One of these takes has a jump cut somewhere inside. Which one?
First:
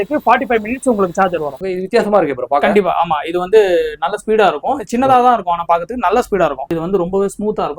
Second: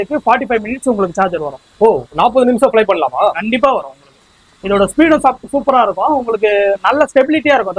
first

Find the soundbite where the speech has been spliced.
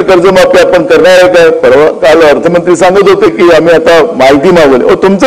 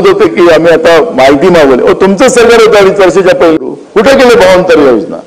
second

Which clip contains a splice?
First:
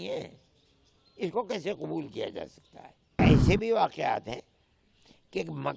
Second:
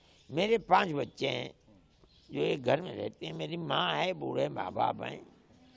first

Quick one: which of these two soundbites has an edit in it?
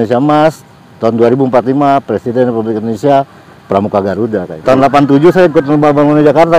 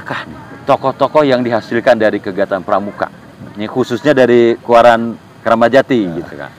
first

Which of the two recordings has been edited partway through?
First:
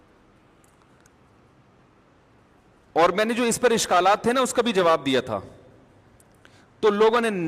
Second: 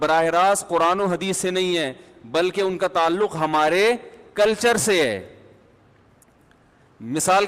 first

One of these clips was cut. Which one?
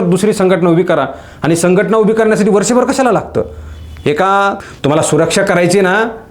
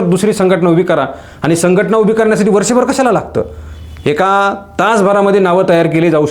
first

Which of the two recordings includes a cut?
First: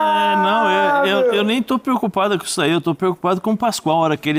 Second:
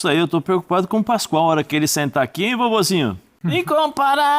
second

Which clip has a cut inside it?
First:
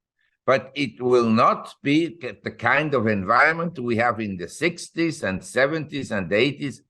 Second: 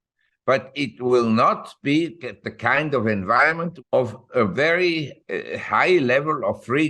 second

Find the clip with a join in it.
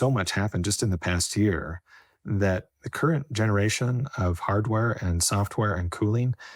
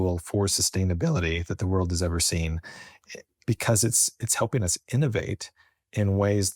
second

